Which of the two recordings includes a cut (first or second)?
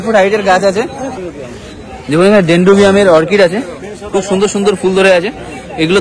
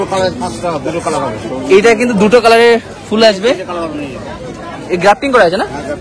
first